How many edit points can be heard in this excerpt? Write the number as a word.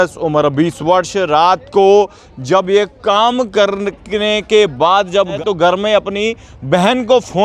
zero